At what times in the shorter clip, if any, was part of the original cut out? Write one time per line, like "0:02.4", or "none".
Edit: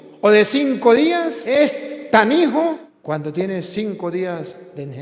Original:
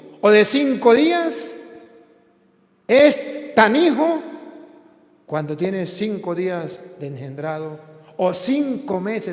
0:01.4
0:02.9